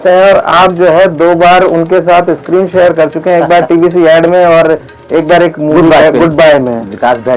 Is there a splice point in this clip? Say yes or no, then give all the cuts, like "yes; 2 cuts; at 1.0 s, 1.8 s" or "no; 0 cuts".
no; 0 cuts